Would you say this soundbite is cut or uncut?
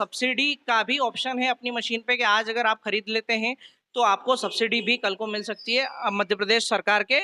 uncut